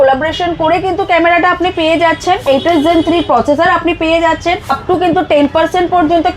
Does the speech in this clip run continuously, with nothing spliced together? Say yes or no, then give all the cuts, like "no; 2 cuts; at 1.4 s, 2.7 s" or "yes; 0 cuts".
no; 2 cuts; at 2.4 s, 4.7 s